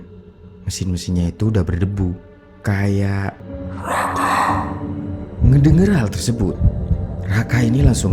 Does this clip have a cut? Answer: yes; 1 cut; at 3.5 s

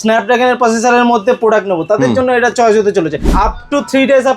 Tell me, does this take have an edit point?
yes; 1 cut; at 3.3 s

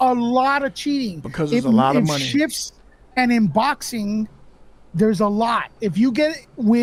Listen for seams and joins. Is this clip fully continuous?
yes; 0 cuts

